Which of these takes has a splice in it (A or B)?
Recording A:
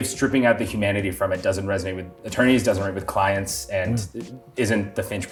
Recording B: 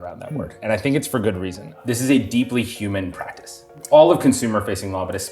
B